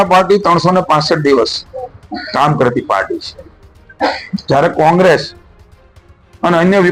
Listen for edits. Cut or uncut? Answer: uncut